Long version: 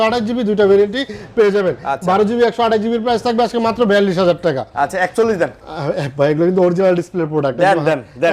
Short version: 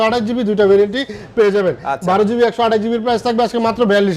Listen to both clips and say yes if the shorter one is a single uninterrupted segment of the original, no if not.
yes